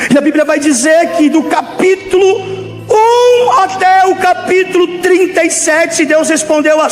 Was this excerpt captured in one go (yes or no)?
yes